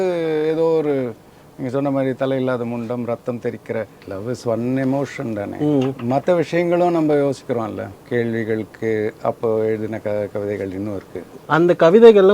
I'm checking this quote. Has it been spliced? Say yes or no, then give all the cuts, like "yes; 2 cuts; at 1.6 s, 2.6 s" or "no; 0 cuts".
yes; 3 cuts; at 4.0 s, 7.9 s, 11.3 s